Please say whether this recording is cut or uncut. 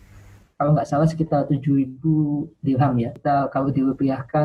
cut